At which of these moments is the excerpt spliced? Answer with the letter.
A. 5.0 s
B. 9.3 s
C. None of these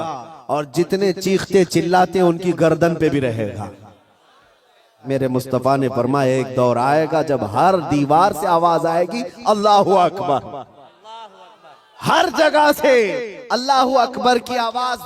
A